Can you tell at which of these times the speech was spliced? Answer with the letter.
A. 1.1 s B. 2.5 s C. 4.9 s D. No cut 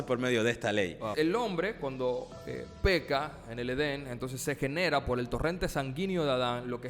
A